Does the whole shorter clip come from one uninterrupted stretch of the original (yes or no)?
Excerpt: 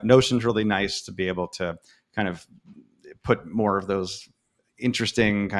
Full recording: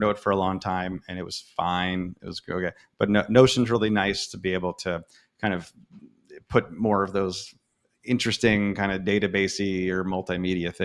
yes